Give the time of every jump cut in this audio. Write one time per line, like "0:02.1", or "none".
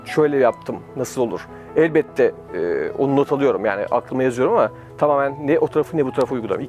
none